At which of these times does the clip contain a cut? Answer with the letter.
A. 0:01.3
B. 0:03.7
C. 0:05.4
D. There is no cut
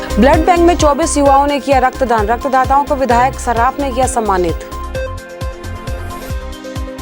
D